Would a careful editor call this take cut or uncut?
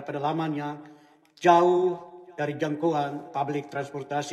uncut